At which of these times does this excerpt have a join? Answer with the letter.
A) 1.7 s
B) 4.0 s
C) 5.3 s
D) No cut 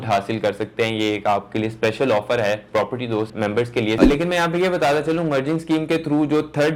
B